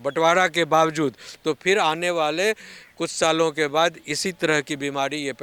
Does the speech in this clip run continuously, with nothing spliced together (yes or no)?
yes